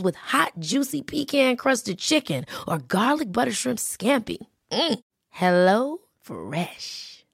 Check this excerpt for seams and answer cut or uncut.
uncut